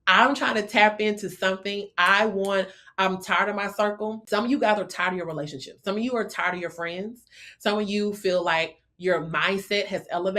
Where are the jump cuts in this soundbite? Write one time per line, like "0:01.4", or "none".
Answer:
0:04.2